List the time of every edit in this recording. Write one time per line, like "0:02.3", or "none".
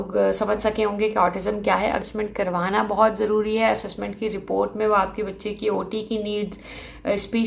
0:02.0